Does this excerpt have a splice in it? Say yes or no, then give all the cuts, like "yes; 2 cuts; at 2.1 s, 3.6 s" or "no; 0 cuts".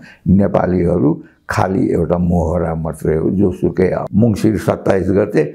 yes; 1 cut; at 4.0 s